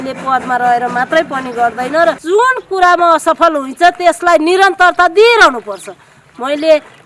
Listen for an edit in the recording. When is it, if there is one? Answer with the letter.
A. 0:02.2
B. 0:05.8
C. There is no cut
A